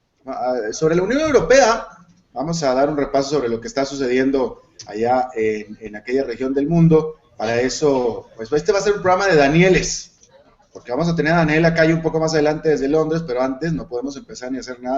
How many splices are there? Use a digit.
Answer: 1